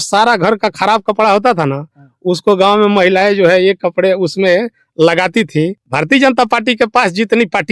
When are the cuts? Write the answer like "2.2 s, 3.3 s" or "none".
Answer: 5.8 s